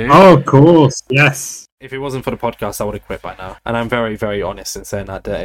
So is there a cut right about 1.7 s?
yes; 1 cut; at 1.7 s

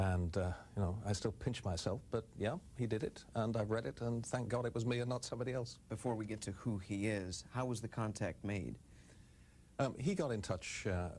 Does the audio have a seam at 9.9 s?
yes; 1 cut; at 9.9 s

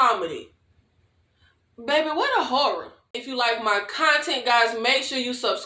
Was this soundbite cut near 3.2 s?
yes; 1 cut; at 3.2 s

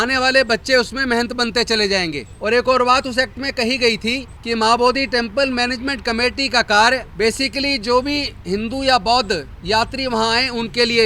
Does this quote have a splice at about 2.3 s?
yes; 3 cuts; at 2.3 s, 4.3 s, 7.1 s

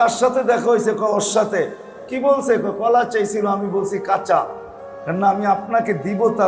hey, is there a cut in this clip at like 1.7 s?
no; 0 cuts

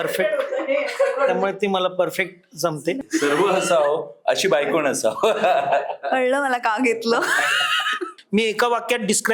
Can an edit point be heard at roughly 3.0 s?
yes; 2 cuts; at 3.0 s, 8.1 s

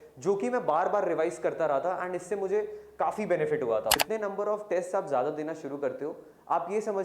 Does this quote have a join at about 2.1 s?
no; 1 cut; at 4.0 s

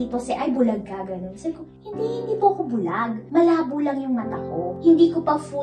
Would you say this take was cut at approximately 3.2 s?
no; 1 cut; at 4.7 s

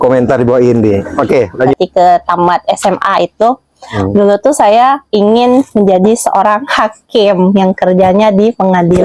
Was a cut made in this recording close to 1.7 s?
yes; 1 cut; at 1.7 s

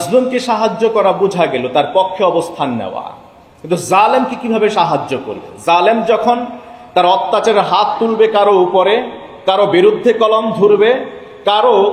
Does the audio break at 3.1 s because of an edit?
no; 0 cuts

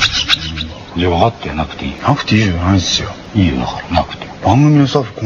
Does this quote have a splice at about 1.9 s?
yes; 2 cuts; at 1.9 s, 3.2 s

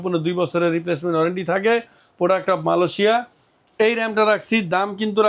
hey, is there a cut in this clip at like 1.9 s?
no; 0 cuts

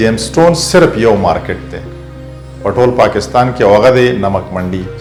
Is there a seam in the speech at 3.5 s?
no; 0 cuts

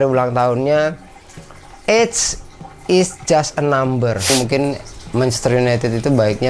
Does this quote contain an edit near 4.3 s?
yes; 1 cut; at 4.3 s

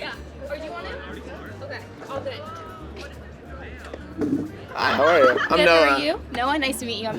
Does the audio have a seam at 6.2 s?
yes; 1 cut; at 6.2 s

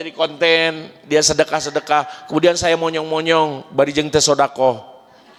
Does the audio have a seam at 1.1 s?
no; 0 cuts

